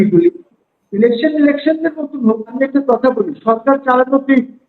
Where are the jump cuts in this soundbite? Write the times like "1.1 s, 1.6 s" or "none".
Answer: 2.6 s